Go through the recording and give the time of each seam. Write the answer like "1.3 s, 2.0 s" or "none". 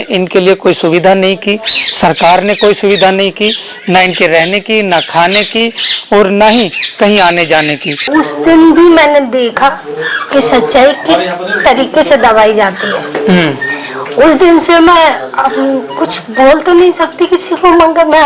8.1 s